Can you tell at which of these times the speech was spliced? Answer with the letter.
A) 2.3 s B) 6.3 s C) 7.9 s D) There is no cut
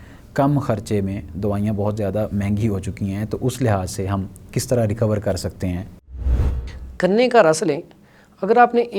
B